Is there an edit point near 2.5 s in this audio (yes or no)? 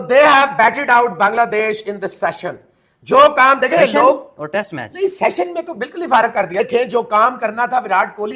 no